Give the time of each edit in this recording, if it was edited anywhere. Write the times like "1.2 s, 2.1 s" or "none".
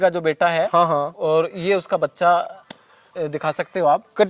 none